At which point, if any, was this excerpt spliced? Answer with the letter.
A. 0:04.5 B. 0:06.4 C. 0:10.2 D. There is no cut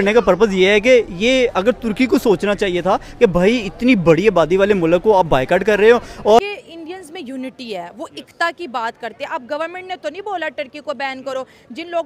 B